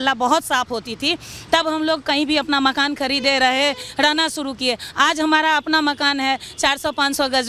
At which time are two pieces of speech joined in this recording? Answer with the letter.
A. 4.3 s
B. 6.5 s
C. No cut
C